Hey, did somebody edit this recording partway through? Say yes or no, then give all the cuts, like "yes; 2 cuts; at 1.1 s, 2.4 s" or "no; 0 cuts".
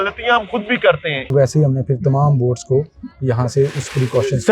yes; 1 cut; at 1.3 s